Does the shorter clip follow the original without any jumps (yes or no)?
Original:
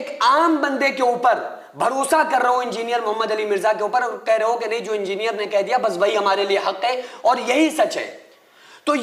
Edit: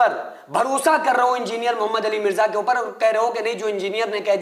yes